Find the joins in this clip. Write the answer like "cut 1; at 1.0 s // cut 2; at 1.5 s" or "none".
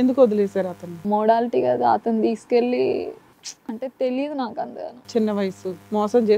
cut 1; at 0.9 s